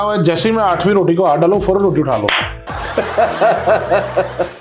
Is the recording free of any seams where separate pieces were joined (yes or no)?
yes